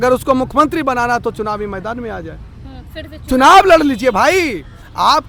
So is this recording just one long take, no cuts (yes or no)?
yes